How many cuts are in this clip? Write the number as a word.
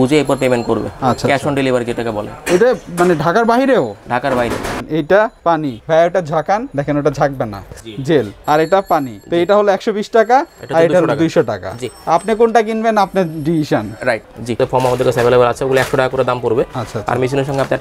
two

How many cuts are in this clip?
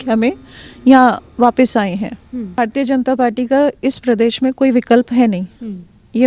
one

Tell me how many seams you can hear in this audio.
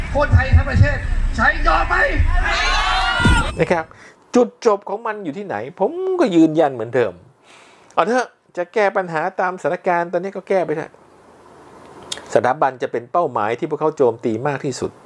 one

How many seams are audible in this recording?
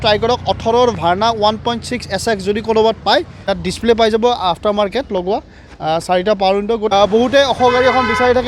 two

